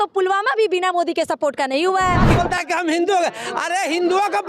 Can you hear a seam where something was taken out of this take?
yes; 1 cut; at 2.3 s

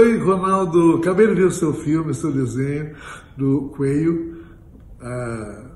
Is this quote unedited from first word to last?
no; 2 cuts; at 1.0 s, 4.5 s

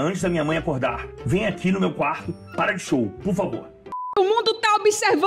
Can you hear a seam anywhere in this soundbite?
yes; 2 cuts; at 1.1 s, 4.0 s

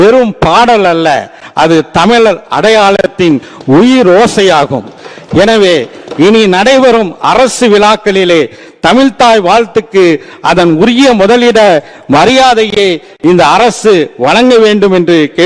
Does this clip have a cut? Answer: no; 0 cuts

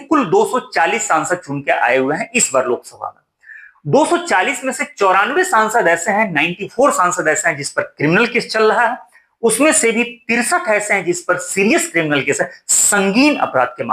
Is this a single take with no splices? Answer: yes; 0 cuts

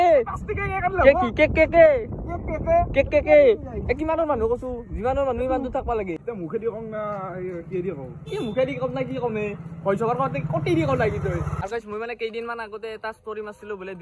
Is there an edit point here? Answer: yes; 2 cuts; at 6.2 s, 11.5 s

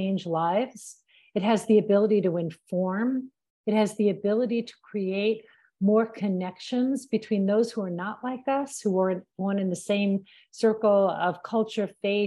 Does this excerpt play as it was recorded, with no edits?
yes; 0 cuts

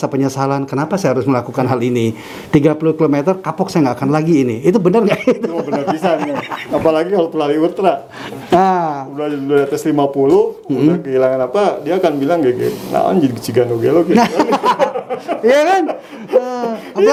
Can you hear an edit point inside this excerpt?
no; 0 cuts

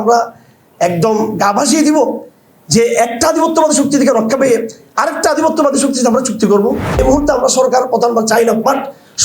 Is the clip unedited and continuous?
no; 1 cut; at 7.0 s

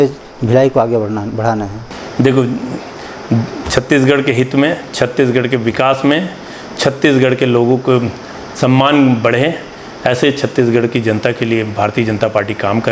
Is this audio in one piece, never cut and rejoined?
yes; 0 cuts

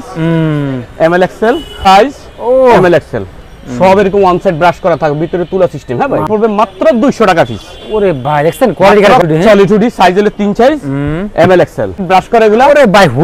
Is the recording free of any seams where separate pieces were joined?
no; 4 cuts; at 1.9 s, 6.2 s, 9.2 s, 12.0 s

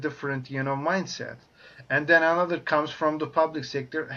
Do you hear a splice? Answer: no; 0 cuts

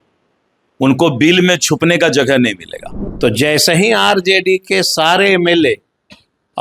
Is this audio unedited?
no; 1 cut; at 3.1 s

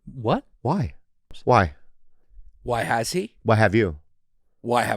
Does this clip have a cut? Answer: yes; 1 cut; at 1.4 s

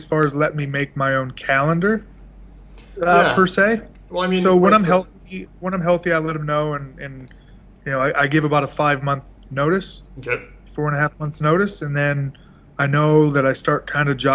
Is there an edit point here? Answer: no; 0 cuts

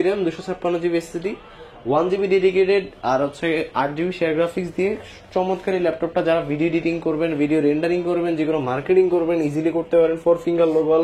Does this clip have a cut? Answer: no; 0 cuts

